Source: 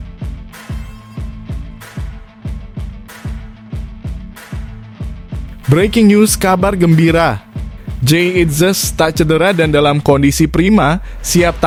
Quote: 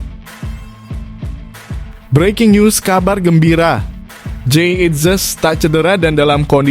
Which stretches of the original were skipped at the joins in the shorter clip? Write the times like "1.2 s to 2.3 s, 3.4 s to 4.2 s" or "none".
2.3 s to 5.6 s